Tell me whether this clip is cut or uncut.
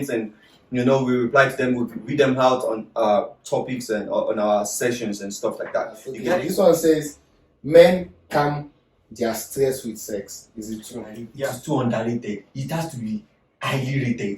cut